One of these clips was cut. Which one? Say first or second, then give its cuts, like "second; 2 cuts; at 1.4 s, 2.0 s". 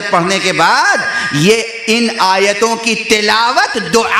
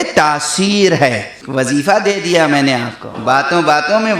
second; 2 cuts; at 1.3 s, 3.1 s